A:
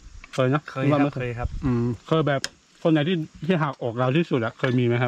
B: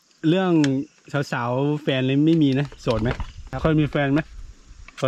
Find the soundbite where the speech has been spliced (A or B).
B